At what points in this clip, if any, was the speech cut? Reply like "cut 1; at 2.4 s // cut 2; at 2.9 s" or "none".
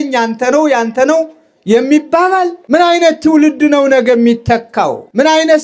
cut 1; at 2.6 s